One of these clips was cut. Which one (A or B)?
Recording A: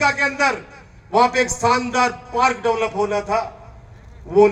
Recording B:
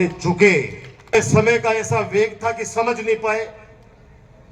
B